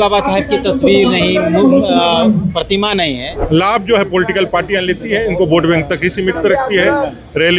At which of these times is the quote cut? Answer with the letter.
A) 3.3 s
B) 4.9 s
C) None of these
A